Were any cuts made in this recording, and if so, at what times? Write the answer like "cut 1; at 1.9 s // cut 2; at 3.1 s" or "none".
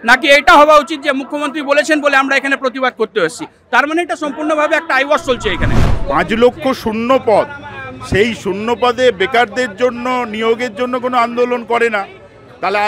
cut 1; at 5.9 s